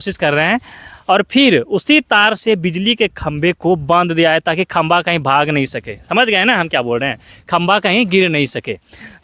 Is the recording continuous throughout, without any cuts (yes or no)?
yes